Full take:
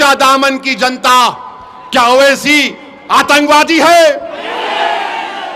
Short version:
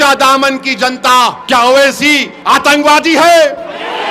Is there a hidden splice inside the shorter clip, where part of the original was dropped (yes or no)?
yes